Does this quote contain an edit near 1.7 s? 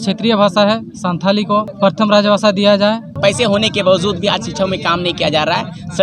yes; 2 cuts; at 1.7 s, 3.2 s

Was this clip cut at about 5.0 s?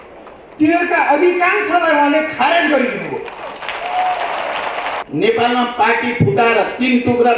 yes; 1 cut; at 5.0 s

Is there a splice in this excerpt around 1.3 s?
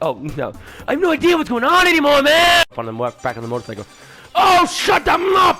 no; 1 cut; at 2.8 s

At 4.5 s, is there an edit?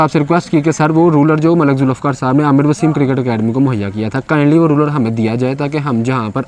no; 0 cuts

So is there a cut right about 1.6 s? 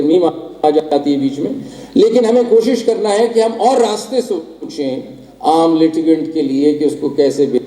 no; 0 cuts

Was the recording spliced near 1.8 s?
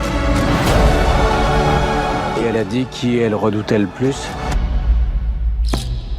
no; 1 cut; at 4.5 s

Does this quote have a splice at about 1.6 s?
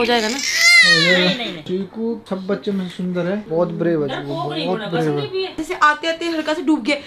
no; 0 cuts

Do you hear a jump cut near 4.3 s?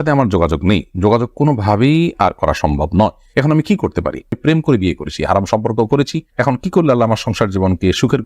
yes; 1 cut; at 4.3 s

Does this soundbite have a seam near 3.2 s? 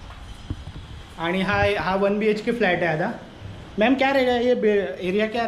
no; 0 cuts

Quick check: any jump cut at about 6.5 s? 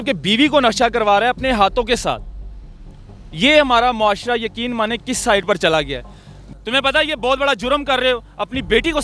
yes; 1 cut; at 6.5 s

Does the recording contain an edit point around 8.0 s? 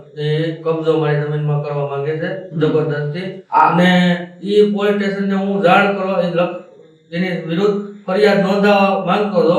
no; 1 cut; at 3.4 s

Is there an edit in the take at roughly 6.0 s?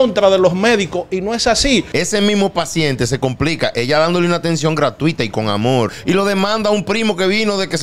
yes; 2 cuts; at 1.9 s, 6.0 s

